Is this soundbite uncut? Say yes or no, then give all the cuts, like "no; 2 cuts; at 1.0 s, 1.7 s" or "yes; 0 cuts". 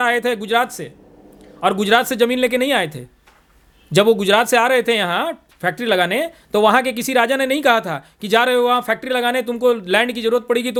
yes; 0 cuts